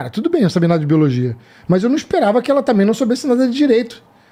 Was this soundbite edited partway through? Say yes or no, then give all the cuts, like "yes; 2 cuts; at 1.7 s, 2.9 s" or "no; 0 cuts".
no; 0 cuts